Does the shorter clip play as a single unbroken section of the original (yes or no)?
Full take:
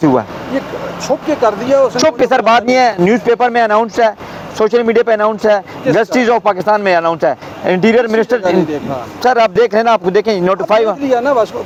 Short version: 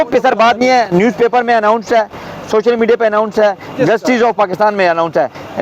yes